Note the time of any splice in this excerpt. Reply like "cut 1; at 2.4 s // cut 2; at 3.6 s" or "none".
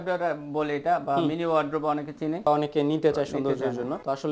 cut 1; at 2.5 s